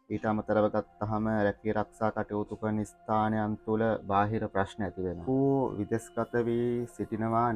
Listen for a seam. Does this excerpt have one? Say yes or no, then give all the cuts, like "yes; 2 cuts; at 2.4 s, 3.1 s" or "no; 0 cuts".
yes; 1 cut; at 5.2 s